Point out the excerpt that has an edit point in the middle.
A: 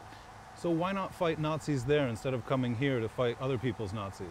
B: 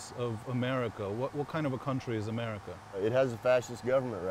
B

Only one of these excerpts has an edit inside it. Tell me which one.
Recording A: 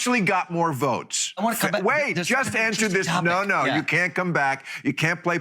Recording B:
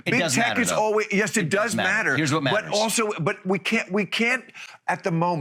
A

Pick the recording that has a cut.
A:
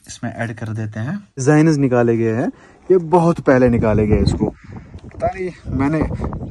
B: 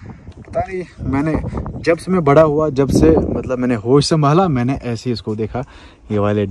A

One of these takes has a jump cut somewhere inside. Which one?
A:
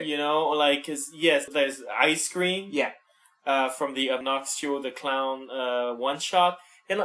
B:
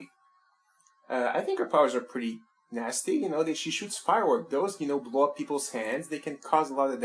B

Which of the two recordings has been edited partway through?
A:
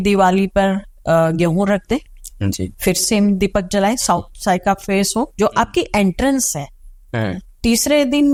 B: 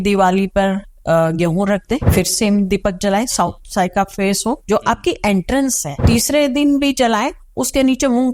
B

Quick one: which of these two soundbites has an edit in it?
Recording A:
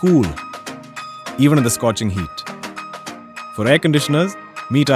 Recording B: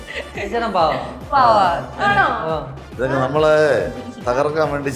B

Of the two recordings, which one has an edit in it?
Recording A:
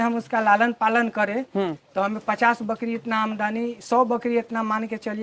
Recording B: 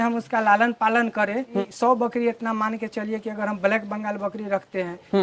B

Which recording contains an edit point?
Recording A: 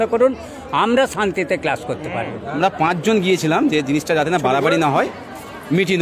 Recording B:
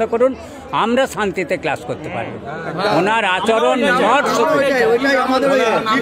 A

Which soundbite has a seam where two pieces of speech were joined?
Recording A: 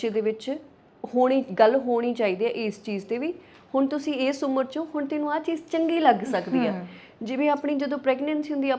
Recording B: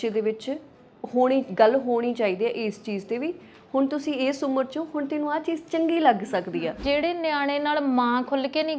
B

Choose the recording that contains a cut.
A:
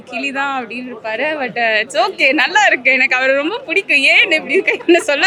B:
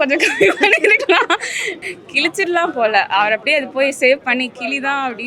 B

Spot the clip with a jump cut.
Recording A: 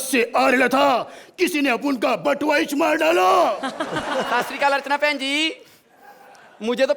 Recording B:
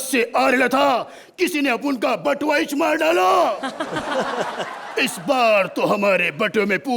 A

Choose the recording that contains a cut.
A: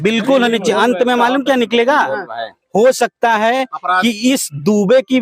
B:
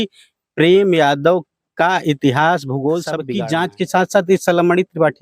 B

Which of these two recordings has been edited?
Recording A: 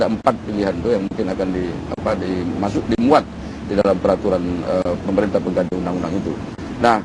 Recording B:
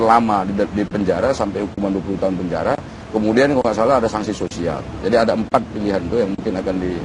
B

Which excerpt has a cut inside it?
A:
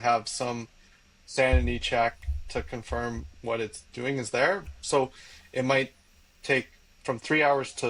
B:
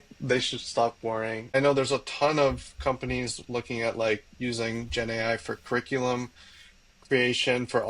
B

